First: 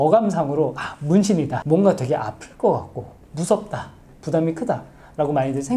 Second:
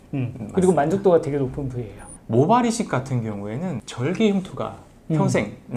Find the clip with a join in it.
second; 1 cut; at 2.2 s

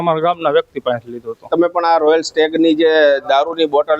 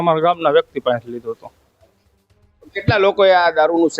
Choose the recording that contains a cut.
first; 1 cut; at 1.5 s

